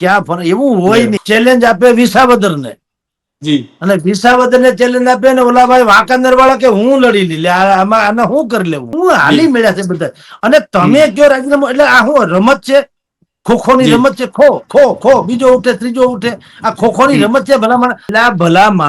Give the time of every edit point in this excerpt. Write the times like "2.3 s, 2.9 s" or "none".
1.2 s, 8.9 s, 18.0 s